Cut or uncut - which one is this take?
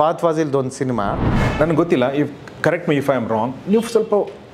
cut